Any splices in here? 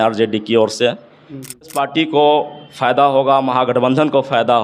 yes; 1 cut; at 1.8 s

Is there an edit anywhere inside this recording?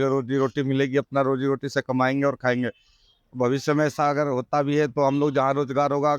no; 0 cuts

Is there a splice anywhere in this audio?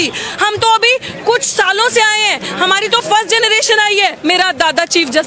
yes; 1 cut; at 4.2 s

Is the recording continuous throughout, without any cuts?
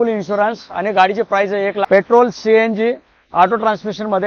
no; 1 cut; at 1.8 s

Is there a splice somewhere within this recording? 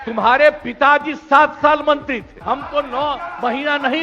yes; 1 cut; at 2.3 s

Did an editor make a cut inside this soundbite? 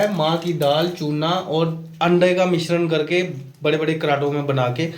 no; 0 cuts

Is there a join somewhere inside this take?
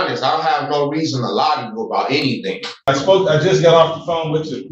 yes; 1 cut; at 2.9 s

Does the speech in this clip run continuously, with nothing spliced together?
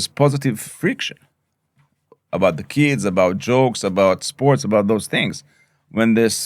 yes; 0 cuts

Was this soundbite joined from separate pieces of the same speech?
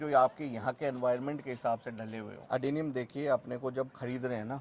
yes; 1 cut; at 2.3 s

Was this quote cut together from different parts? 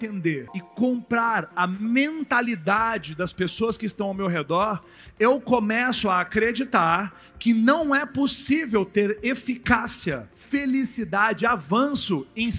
no; 0 cuts

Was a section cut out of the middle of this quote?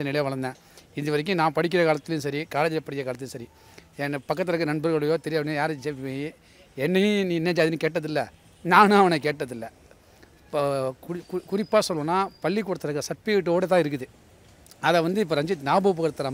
no; 0 cuts

